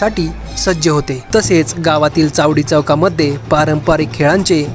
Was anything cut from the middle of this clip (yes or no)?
yes